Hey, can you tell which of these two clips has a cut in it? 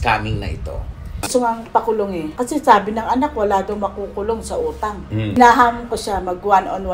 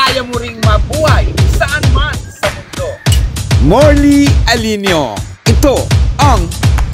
first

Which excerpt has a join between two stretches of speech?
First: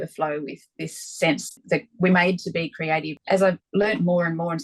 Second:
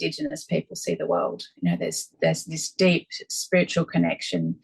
first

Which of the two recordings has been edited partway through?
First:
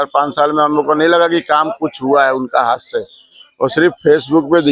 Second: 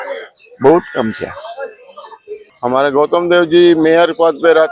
second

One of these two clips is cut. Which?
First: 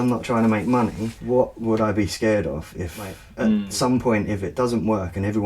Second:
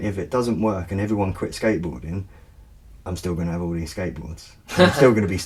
first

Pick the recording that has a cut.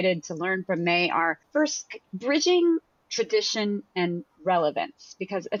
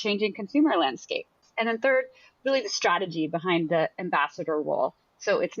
second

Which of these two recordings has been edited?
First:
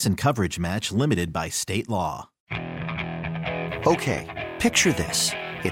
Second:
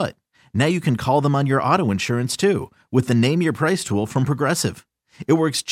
first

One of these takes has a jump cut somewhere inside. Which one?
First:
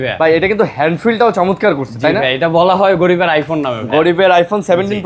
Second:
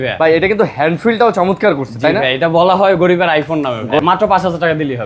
second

